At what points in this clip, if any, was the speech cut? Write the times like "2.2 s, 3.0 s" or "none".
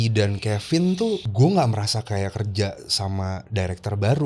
1.3 s